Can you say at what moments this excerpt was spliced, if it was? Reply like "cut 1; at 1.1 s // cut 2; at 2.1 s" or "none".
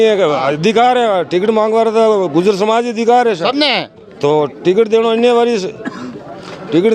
none